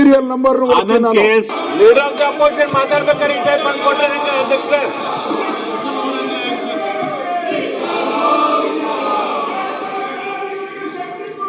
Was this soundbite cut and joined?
yes; 1 cut; at 1.5 s

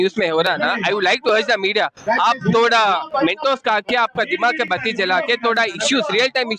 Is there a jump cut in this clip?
no; 0 cuts

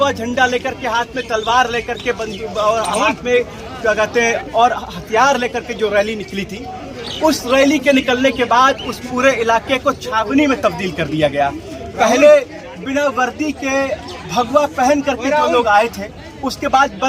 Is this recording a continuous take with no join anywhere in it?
yes; 0 cuts

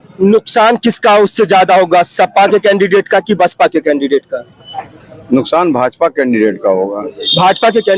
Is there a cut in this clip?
no; 0 cuts

